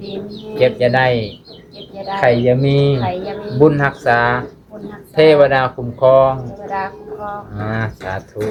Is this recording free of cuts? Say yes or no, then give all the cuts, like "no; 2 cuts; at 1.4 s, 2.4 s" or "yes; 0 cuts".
yes; 0 cuts